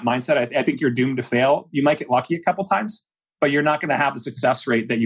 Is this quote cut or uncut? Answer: uncut